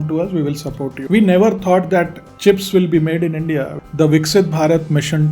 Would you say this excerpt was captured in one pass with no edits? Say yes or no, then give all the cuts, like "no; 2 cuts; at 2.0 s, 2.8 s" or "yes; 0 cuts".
no; 2 cuts; at 2.2 s, 3.8 s